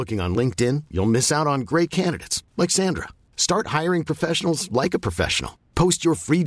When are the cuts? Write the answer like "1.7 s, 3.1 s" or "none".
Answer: none

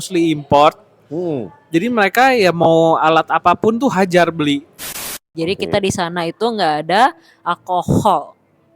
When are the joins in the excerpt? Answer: 5.2 s

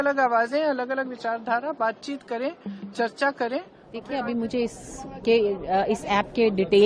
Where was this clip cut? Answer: 4.0 s

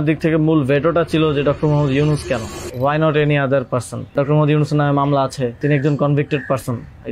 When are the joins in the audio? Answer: 2.6 s, 4.1 s, 5.6 s

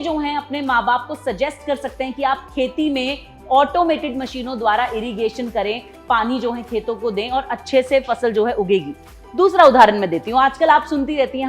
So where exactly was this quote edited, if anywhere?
none

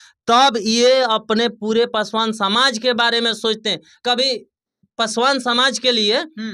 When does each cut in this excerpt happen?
none

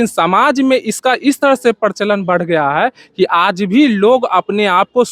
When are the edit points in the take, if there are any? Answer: none

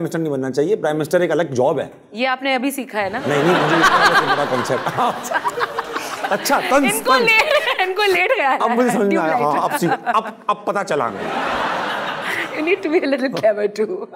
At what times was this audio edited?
none

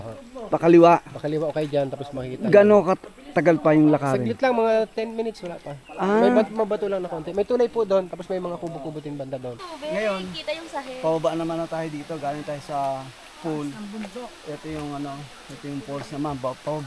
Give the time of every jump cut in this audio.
9.6 s

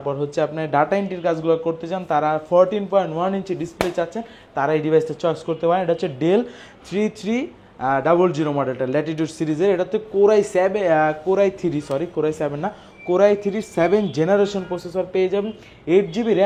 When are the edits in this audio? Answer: none

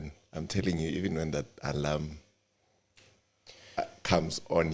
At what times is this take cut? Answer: none

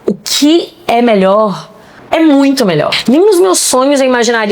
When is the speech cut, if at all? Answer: 3.0 s

